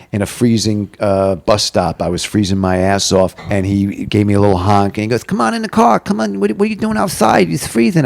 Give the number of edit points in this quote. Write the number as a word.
one